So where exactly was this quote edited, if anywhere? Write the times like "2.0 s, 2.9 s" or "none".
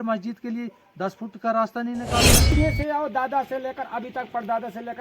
2.5 s